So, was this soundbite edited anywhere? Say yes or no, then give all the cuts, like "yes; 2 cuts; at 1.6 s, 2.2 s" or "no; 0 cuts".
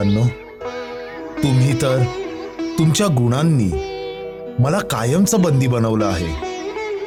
no; 0 cuts